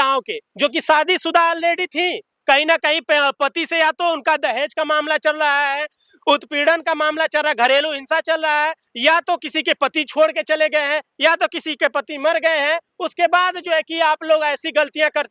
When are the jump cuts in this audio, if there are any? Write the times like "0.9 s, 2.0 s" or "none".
none